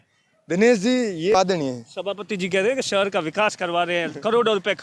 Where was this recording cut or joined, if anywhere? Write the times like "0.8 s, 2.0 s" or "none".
1.3 s